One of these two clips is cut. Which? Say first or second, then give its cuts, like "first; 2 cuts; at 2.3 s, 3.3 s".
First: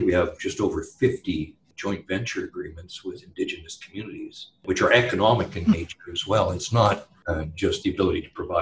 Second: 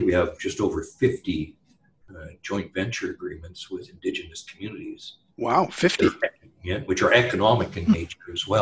first; 3 cuts; at 1.6 s, 4.5 s, 7.2 s